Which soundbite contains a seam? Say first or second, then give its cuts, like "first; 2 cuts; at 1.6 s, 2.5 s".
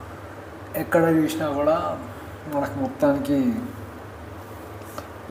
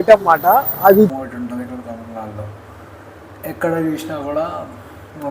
second; 1 cut; at 1.1 s